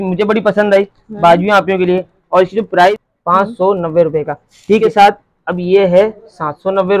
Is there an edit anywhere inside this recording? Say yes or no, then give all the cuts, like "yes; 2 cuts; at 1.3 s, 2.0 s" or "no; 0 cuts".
yes; 2 cuts; at 3.0 s, 4.8 s